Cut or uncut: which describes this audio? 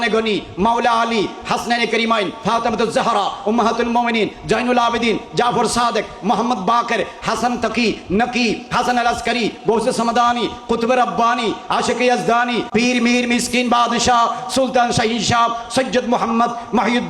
cut